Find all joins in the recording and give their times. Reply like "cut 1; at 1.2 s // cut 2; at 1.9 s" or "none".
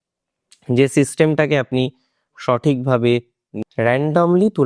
cut 1; at 3.4 s

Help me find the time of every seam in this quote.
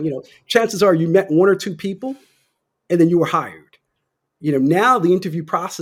none

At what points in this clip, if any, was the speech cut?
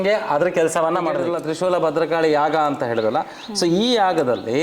cut 1; at 1.2 s

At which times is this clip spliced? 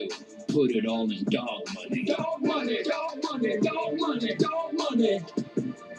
none

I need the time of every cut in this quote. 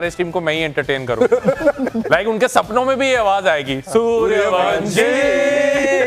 none

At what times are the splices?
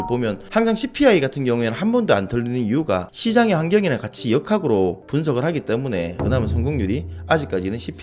none

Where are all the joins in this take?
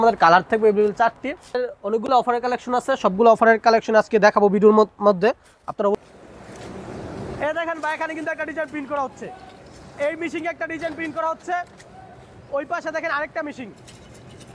cut 1; at 1.6 s // cut 2; at 5.9 s

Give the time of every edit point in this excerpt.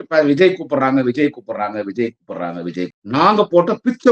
cut 1; at 2.9 s

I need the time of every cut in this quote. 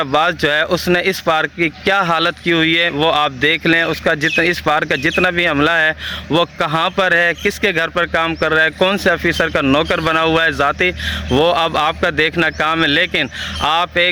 none

